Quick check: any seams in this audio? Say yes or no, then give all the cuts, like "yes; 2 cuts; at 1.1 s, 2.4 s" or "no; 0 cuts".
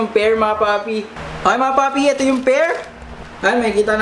yes; 1 cut; at 1.0 s